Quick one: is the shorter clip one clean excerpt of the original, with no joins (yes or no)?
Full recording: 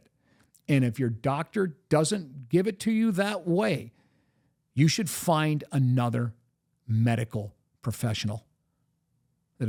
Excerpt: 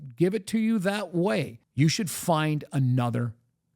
no